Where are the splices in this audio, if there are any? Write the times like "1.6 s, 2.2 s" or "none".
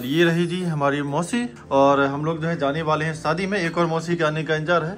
1.6 s